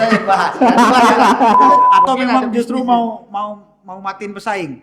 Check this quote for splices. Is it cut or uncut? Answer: cut